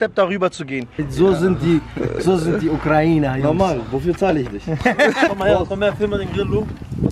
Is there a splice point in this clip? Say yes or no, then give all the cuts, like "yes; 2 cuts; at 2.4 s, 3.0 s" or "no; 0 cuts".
yes; 2 cuts; at 1.0 s, 5.3 s